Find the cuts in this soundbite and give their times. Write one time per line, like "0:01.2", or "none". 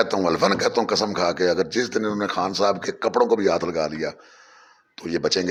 none